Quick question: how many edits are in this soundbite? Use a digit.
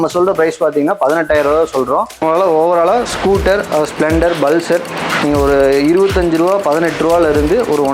1